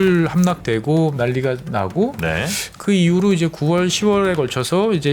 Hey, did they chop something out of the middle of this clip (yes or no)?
yes